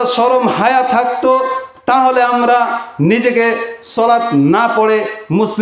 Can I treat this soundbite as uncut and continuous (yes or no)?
yes